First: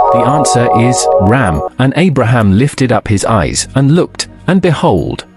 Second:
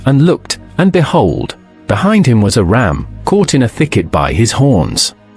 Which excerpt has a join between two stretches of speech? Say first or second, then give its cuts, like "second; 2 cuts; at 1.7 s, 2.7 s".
first; 1 cut; at 1.2 s